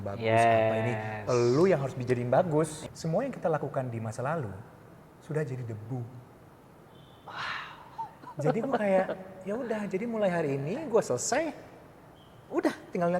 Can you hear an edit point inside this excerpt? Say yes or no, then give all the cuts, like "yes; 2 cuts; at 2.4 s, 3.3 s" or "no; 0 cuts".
yes; 1 cut; at 2.8 s